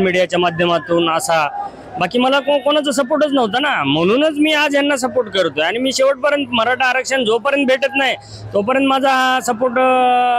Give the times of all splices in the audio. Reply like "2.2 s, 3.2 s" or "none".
none